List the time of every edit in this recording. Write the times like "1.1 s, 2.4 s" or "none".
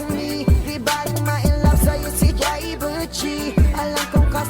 none

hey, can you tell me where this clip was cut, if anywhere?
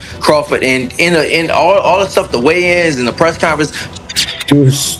3.8 s

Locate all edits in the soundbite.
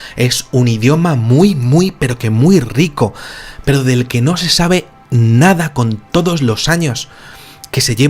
2.7 s

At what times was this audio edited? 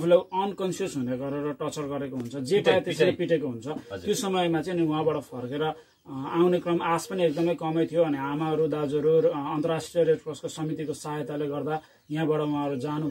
none

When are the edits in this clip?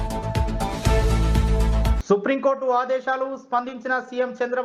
none

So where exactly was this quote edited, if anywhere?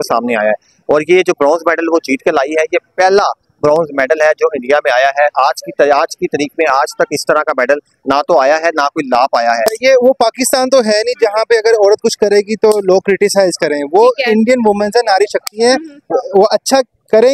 9.8 s

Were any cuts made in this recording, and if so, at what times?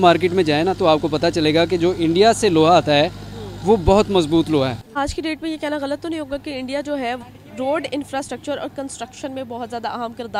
4.8 s, 7.2 s

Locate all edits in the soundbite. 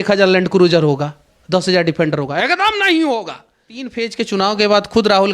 3.9 s

